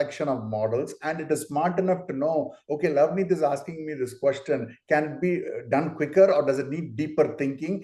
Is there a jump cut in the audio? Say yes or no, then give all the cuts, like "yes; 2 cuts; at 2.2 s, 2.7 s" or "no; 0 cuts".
no; 0 cuts